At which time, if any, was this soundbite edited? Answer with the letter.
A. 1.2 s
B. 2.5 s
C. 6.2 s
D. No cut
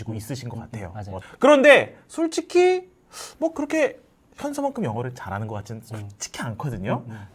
A